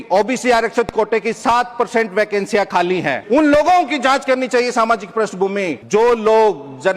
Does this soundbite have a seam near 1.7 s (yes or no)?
no